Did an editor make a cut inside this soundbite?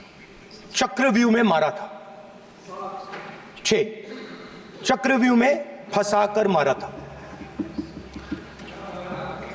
no; 0 cuts

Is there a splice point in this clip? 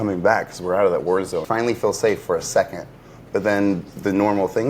yes; 1 cut; at 1.5 s

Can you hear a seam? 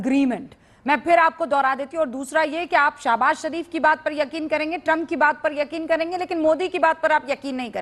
no; 0 cuts

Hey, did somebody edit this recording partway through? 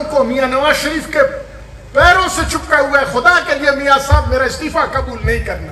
no; 0 cuts

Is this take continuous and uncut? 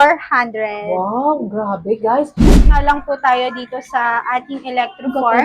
no; 1 cut; at 2.6 s

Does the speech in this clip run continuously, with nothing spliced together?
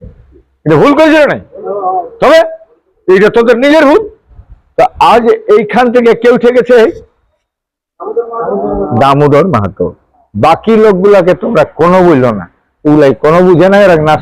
yes; 0 cuts

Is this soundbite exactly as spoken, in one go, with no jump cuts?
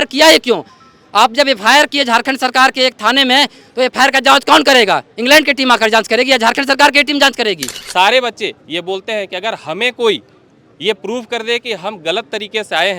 no; 1 cut; at 7.7 s

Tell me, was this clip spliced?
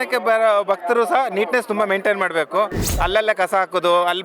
yes; 1 cut; at 2.8 s

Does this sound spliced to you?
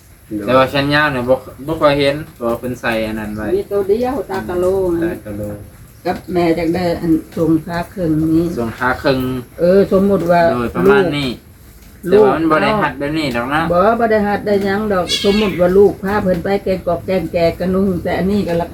no; 0 cuts

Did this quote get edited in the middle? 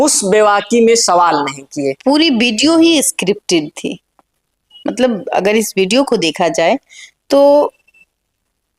yes; 1 cut; at 1.9 s

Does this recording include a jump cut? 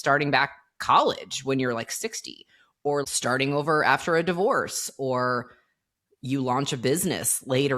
yes; 1 cut; at 3.0 s

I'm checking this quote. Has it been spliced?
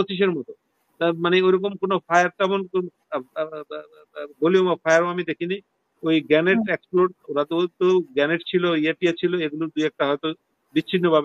no; 0 cuts

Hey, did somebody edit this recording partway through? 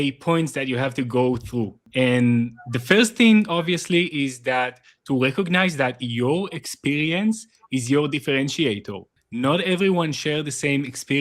yes; 1 cut; at 1.8 s

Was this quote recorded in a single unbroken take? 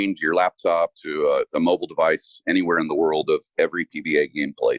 yes; 0 cuts

